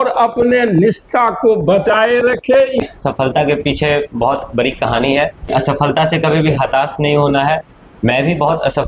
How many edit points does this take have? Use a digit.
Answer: 2